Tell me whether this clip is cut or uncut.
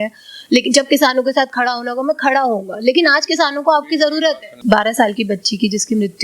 cut